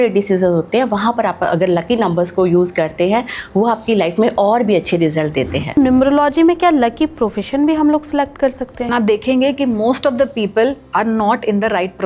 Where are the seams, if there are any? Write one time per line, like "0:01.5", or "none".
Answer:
0:05.8
0:08.8